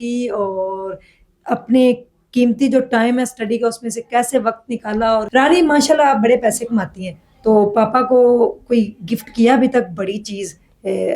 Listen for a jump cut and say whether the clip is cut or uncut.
cut